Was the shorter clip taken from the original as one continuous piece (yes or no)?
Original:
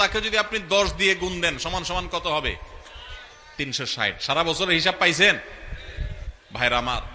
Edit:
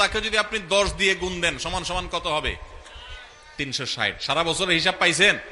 yes